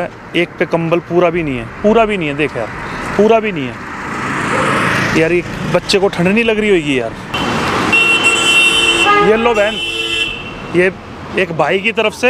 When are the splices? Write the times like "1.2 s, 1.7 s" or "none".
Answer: 7.3 s